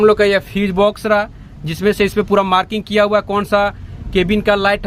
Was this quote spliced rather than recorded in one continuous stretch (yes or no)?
no